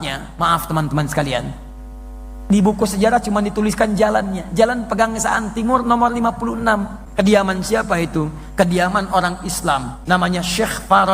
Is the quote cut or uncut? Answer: cut